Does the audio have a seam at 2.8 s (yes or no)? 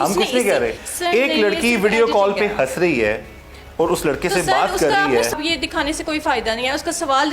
no